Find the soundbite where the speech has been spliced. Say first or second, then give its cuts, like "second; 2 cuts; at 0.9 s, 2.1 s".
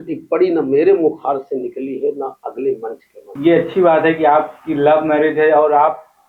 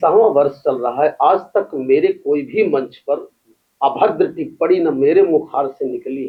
first; 1 cut; at 3.4 s